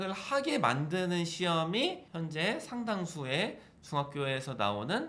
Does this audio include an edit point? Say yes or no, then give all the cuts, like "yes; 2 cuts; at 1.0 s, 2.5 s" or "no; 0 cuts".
yes; 1 cut; at 2.1 s